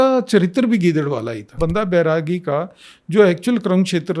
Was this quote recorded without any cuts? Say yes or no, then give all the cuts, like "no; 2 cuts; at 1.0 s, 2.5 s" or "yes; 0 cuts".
no; 1 cut; at 1.6 s